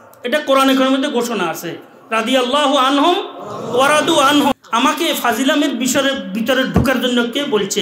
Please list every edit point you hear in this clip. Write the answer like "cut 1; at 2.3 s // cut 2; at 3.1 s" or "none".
cut 1; at 4.5 s